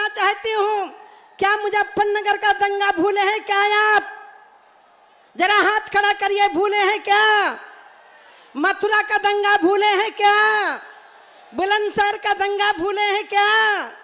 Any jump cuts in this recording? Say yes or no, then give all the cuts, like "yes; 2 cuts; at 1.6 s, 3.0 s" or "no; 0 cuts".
no; 0 cuts